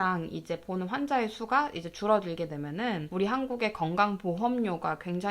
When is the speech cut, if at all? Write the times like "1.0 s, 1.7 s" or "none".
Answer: 3.1 s